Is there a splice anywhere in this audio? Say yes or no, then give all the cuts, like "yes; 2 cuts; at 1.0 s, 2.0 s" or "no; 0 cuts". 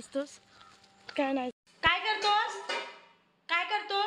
yes; 1 cut; at 1.6 s